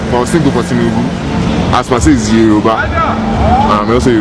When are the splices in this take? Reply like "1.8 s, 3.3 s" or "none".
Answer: none

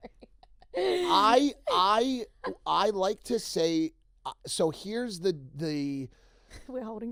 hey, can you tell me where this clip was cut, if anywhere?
none

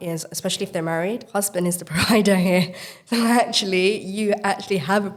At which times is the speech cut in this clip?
none

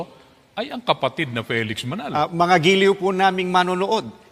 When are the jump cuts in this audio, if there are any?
2.1 s

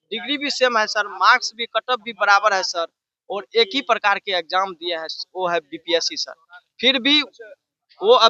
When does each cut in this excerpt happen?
none

